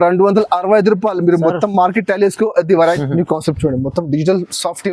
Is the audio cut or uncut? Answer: cut